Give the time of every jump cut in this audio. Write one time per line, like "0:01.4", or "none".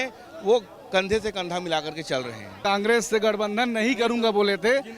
0:02.6